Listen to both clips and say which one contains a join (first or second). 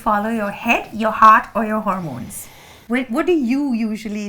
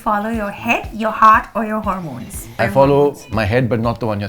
second